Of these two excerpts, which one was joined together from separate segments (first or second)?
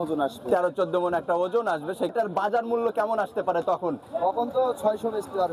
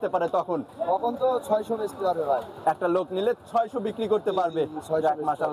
first